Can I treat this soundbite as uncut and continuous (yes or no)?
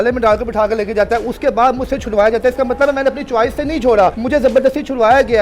no